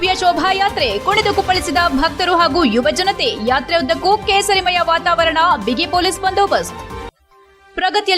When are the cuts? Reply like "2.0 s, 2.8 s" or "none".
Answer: none